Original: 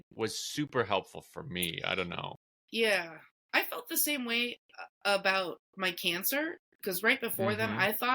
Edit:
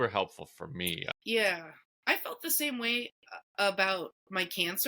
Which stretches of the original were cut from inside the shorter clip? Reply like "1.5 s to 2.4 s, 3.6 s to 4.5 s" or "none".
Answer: 1.8 s to 2.5 s